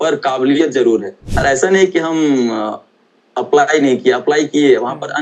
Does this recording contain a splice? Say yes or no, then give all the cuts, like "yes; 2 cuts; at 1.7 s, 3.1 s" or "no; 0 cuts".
yes; 1 cut; at 1.2 s